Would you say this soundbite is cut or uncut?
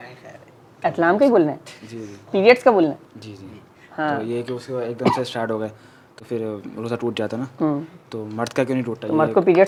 uncut